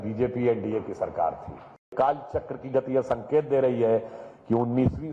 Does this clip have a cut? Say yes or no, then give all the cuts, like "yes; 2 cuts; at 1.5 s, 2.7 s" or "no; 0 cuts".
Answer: yes; 1 cut; at 1.9 s